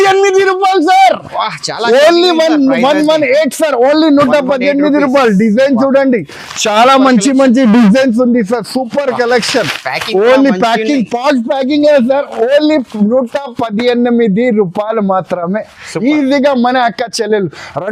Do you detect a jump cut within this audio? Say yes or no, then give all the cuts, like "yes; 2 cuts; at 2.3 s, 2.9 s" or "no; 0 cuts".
no; 0 cuts